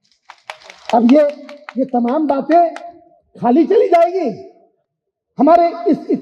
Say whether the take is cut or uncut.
uncut